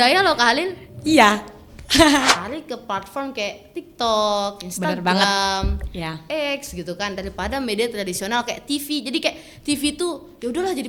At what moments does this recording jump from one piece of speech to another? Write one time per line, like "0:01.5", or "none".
0:02.2